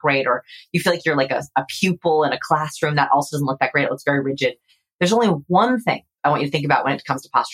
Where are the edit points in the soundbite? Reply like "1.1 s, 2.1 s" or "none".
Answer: 6.1 s